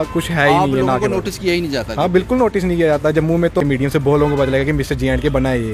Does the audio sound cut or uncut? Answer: cut